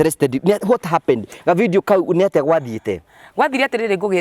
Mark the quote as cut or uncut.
uncut